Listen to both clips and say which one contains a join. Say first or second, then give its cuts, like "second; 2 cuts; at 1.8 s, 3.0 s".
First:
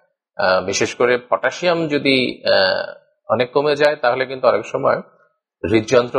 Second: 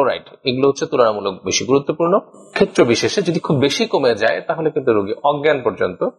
second; 1 cut; at 2.4 s